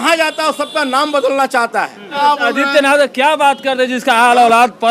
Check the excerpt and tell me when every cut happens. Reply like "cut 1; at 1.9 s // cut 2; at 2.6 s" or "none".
cut 1; at 2.2 s